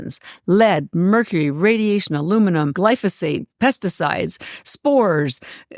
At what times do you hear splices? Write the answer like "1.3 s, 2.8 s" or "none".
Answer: 2.8 s